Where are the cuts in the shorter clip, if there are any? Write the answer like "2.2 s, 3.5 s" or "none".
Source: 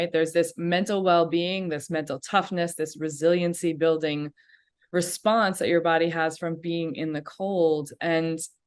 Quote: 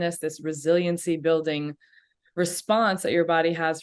none